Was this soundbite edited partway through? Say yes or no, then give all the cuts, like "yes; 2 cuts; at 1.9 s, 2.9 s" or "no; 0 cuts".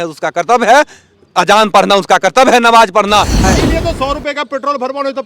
yes; 1 cut; at 3.6 s